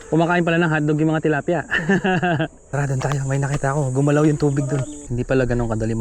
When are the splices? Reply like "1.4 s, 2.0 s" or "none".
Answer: 2.6 s, 5.0 s